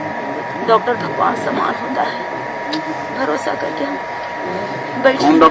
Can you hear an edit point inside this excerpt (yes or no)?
no